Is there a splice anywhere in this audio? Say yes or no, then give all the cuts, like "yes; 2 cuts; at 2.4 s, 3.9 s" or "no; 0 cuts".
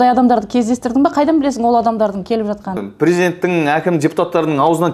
yes; 1 cut; at 2.8 s